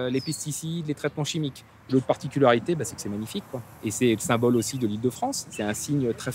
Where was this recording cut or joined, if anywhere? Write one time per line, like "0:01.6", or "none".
0:01.9